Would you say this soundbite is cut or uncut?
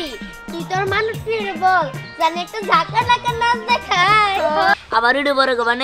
cut